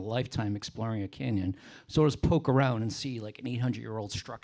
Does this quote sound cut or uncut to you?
uncut